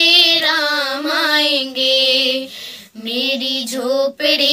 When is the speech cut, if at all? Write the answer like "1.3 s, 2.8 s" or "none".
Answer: none